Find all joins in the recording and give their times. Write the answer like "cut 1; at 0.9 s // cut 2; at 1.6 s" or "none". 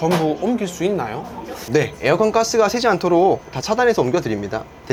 none